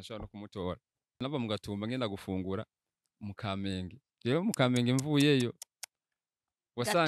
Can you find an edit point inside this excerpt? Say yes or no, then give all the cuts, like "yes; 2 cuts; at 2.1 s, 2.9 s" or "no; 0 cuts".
yes; 1 cut; at 1.2 s